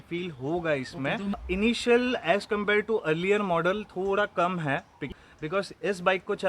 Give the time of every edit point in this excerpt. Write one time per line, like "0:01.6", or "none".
0:01.4
0:05.0